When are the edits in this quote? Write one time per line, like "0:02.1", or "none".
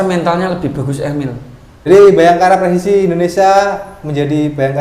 0:01.9